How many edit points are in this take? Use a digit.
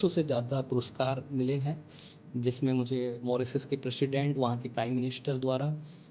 0